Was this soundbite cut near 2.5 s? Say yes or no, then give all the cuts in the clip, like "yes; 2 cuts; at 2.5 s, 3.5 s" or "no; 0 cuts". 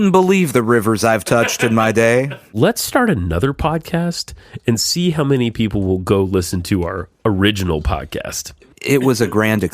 yes; 2 cuts; at 2.5 s, 8.6 s